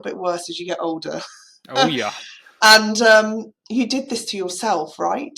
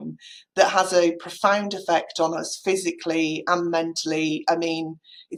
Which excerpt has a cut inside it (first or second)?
first